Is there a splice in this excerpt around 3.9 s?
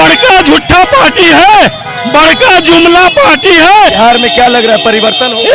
yes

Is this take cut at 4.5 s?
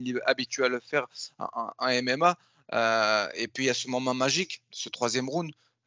no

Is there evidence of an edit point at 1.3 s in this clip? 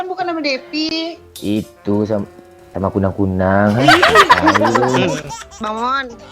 no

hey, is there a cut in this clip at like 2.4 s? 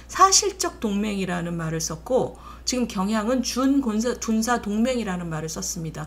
no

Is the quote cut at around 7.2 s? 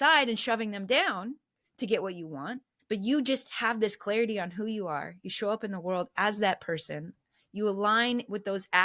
no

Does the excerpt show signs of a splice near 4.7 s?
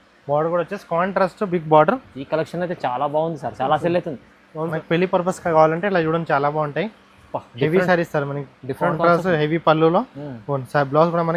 yes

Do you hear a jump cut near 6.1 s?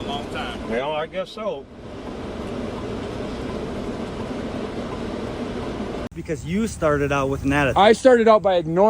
yes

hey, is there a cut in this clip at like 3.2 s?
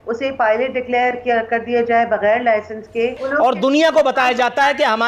yes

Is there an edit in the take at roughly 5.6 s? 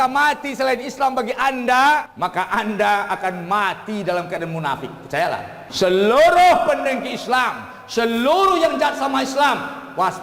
yes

